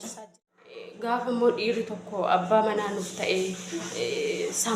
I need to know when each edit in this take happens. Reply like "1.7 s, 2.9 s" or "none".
0.9 s